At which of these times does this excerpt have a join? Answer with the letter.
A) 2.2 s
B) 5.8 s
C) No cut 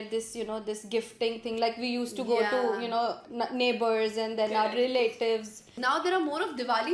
B